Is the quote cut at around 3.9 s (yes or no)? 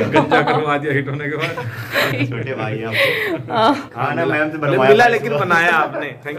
yes